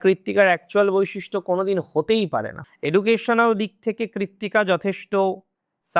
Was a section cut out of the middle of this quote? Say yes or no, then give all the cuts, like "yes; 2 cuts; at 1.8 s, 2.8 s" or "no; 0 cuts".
yes; 1 cut; at 2.5 s